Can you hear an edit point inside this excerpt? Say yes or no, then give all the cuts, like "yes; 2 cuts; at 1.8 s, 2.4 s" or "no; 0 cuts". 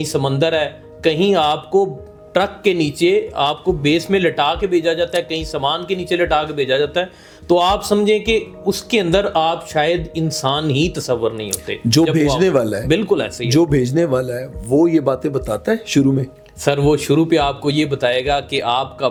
no; 0 cuts